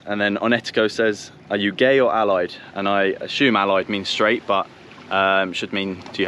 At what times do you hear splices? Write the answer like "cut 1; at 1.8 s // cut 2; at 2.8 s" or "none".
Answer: none